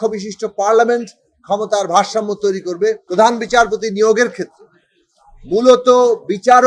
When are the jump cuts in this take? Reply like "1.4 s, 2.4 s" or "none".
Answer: 3.0 s